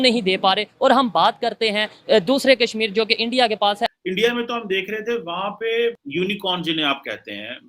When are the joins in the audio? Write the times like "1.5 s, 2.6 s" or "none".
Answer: 4.0 s, 6.0 s